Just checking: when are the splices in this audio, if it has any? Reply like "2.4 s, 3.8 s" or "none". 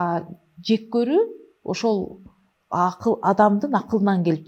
none